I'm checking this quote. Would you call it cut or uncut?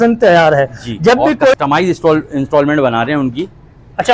cut